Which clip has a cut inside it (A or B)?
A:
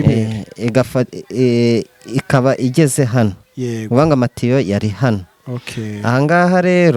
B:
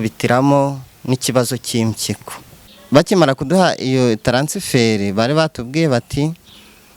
B